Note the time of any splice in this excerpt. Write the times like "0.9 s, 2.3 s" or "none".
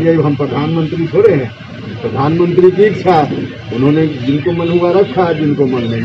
none